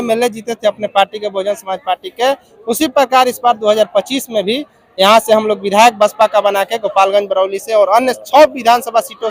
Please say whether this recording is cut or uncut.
uncut